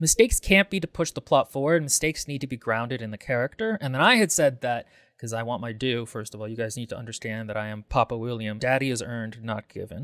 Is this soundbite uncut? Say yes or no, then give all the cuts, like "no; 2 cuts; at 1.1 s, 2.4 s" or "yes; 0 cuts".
no; 1 cut; at 8.6 s